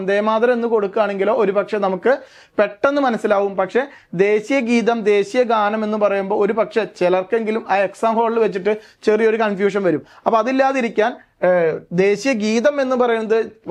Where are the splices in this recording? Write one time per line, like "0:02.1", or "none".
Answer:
none